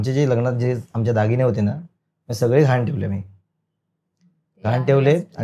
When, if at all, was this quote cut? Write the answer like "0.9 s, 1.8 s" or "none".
none